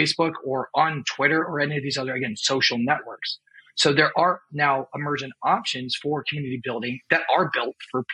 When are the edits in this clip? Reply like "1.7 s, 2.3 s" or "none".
none